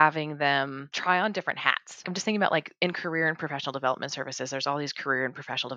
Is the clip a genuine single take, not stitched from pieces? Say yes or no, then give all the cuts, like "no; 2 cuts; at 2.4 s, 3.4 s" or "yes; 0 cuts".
no; 2 cuts; at 0.9 s, 2.1 s